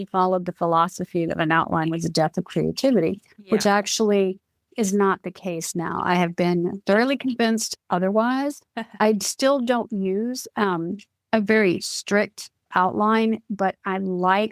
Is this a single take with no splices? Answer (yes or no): no